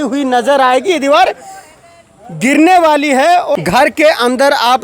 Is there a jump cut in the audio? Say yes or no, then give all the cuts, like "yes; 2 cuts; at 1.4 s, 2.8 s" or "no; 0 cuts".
yes; 1 cut; at 3.5 s